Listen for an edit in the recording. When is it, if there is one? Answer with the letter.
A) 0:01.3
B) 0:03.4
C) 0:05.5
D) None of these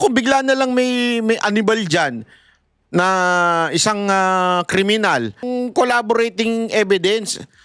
C